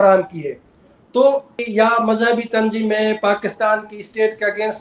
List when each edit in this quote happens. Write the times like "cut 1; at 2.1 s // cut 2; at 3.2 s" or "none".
cut 1; at 1.6 s